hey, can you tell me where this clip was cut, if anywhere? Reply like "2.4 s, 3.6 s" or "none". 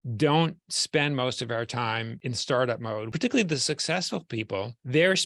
2.2 s, 3.1 s